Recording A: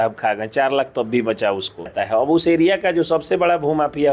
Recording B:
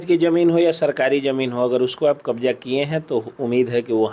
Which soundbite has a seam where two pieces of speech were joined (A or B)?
A